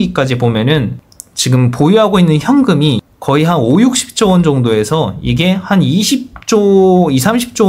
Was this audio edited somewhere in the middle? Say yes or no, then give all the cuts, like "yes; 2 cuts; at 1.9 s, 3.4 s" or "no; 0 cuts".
no; 0 cuts